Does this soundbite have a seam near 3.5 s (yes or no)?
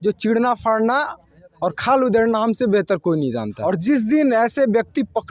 yes